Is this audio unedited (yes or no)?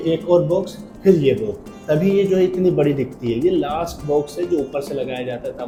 yes